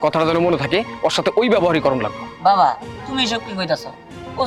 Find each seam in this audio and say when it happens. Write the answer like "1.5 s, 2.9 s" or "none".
none